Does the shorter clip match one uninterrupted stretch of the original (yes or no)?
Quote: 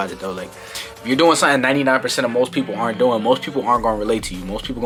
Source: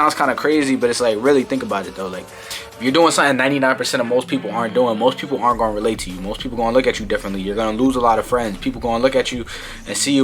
yes